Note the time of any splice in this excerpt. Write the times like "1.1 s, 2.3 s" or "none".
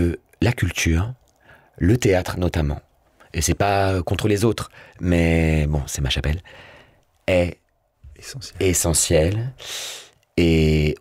none

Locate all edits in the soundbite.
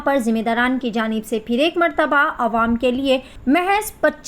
3.3 s

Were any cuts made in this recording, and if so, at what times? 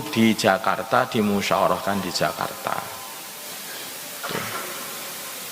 none

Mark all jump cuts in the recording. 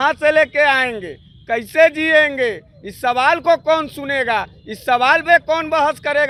none

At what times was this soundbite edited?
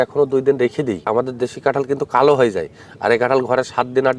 1.0 s

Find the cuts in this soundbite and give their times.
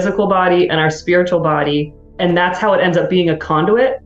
2.0 s

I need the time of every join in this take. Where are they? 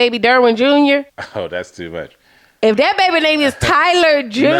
1.2 s

